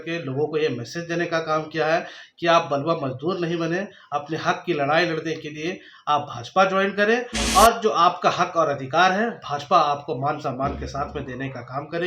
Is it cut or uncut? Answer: uncut